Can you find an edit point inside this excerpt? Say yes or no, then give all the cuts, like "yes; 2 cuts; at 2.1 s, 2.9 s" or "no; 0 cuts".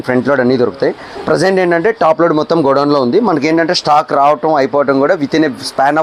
no; 0 cuts